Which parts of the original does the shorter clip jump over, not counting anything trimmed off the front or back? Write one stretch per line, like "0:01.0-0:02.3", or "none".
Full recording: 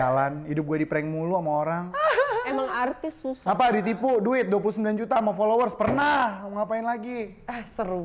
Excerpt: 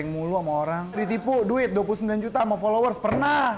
0:02.0-0:03.7